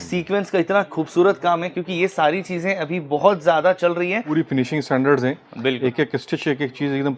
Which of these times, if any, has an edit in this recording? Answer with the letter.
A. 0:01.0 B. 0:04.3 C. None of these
B